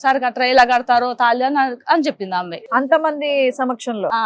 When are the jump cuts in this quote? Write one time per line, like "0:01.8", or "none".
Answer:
0:02.5